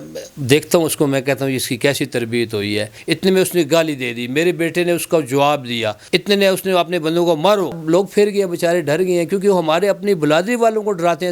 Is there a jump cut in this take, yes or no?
yes